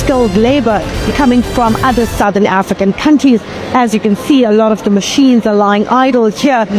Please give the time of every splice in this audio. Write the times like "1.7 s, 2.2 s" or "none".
none